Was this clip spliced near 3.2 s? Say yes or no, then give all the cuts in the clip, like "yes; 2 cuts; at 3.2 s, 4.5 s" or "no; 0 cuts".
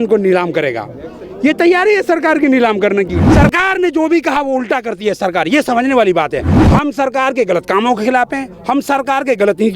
yes; 2 cuts; at 3.2 s, 6.6 s